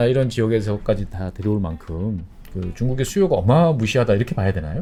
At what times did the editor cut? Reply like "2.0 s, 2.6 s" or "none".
none